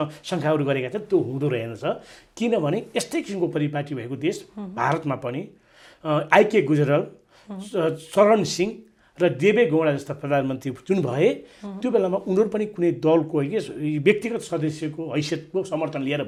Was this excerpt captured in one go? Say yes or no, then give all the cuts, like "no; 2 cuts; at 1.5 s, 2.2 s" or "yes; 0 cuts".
yes; 0 cuts